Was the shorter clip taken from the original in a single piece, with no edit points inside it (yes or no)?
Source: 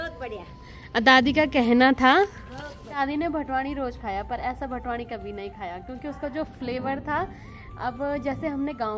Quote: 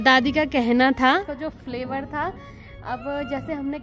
no